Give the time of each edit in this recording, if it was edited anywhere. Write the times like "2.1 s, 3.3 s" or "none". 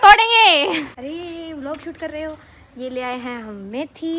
0.9 s